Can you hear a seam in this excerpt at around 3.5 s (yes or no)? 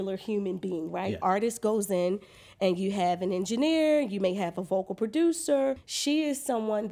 no